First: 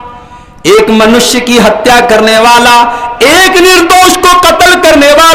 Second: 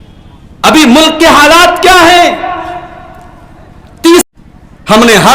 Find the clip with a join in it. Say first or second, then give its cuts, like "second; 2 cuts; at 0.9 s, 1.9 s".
second; 1 cut; at 4.2 s